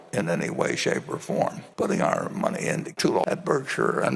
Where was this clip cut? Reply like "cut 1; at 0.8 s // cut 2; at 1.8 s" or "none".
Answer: cut 1; at 2.9 s

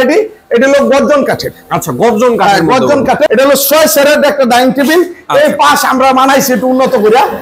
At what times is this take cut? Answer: cut 1; at 3.3 s

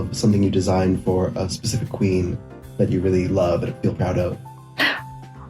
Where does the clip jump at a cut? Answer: cut 1; at 4.5 s

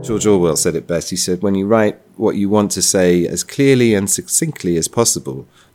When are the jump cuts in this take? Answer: none

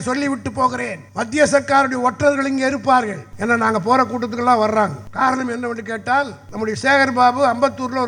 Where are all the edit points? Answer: cut 1; at 1.0 s // cut 2; at 3.2 s // cut 3; at 5.0 s // cut 4; at 6.4 s

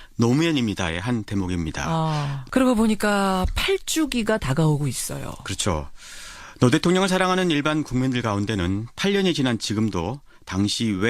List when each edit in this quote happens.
cut 1; at 9.8 s

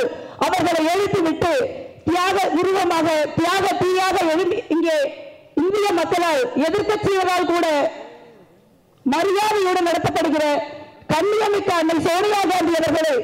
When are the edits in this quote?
none

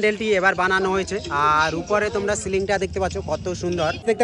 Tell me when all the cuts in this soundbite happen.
none

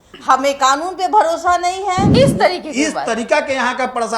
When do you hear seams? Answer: cut 1; at 2.1 s

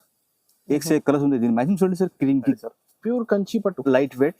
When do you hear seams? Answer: cut 1; at 2.6 s

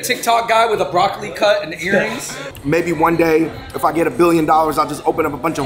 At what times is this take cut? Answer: cut 1; at 2.5 s

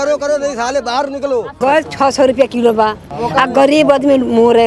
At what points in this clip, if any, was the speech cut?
cut 1; at 1.6 s // cut 2; at 3.1 s

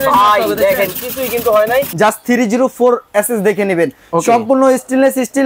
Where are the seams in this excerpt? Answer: cut 1; at 1.9 s

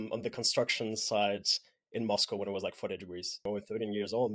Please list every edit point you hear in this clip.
cut 1; at 3.4 s

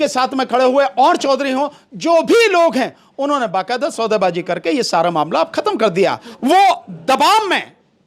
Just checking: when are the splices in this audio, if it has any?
cut 1; at 6.3 s

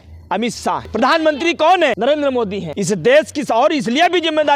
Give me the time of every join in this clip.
cut 1; at 0.9 s // cut 2; at 2.3 s

